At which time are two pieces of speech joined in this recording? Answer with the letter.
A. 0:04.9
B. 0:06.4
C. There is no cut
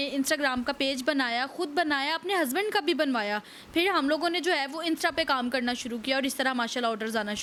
C